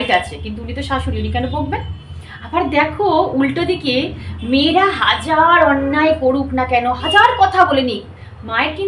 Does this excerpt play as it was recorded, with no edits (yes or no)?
yes